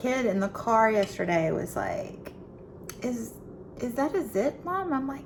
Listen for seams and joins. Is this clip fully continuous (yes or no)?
yes